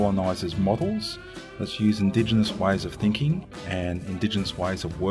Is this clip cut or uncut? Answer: cut